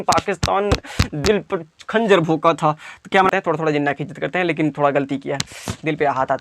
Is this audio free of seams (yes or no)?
no